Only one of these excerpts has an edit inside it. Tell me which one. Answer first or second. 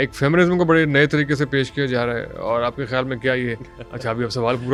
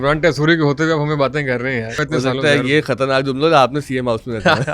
second